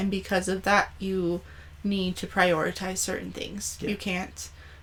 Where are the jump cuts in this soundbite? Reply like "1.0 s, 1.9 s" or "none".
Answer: none